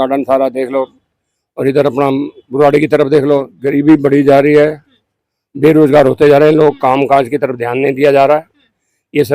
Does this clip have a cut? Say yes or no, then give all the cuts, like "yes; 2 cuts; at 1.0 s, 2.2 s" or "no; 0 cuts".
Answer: yes; 1 cut; at 3.6 s